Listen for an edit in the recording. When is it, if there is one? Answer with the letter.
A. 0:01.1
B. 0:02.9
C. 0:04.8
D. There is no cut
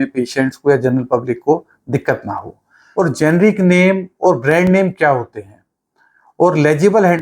B